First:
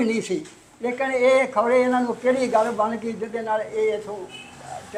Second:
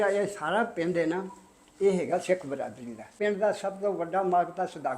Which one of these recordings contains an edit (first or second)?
second